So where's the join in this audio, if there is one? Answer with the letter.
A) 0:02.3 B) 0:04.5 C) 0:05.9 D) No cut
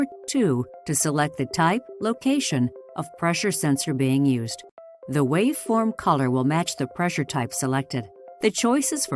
D